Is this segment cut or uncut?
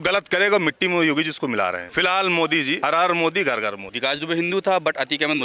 cut